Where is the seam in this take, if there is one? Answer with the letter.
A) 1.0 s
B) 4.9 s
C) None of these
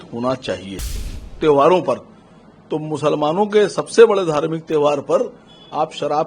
A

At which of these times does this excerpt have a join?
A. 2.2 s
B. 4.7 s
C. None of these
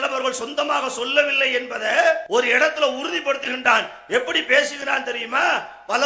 A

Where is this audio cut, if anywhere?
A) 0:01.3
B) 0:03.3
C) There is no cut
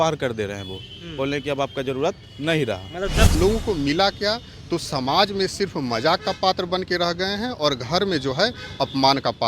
B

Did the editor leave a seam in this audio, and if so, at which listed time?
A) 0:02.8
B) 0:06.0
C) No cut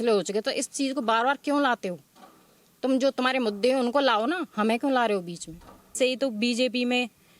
B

